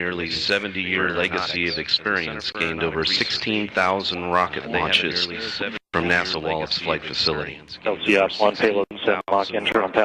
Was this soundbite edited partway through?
yes; 1 cut; at 8.7 s

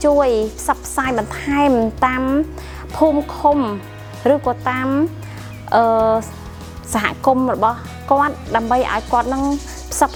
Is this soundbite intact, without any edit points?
yes; 0 cuts

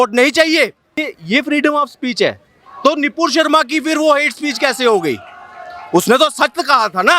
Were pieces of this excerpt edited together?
yes; 1 cut; at 1.0 s

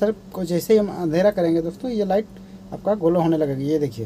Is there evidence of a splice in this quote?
no; 0 cuts

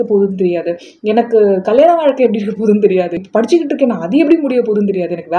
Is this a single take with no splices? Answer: no; 1 cut; at 3.1 s

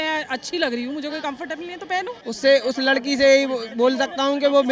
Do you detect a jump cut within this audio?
yes; 1 cut; at 2.2 s

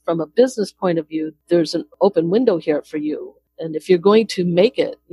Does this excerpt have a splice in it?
yes; 1 cut; at 1.9 s

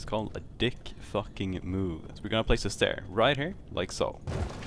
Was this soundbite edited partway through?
no; 0 cuts

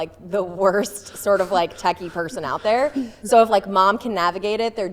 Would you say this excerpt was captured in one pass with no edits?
yes; 0 cuts

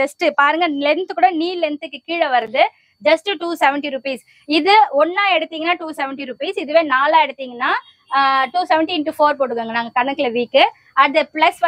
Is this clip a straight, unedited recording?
yes; 0 cuts

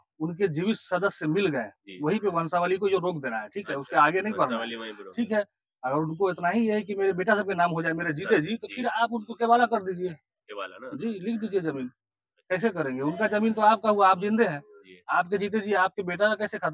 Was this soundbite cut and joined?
no; 0 cuts

